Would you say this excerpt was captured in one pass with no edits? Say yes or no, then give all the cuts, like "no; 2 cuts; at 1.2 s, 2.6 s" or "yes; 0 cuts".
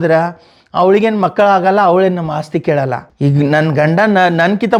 no; 1 cut; at 3.0 s